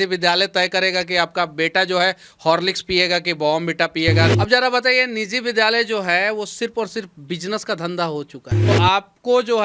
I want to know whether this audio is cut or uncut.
cut